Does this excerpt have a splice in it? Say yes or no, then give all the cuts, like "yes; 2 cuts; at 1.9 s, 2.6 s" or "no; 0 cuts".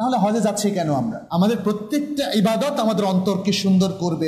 yes; 1 cut; at 1.2 s